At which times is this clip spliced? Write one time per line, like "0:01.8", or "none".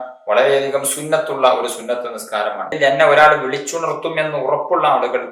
0:02.7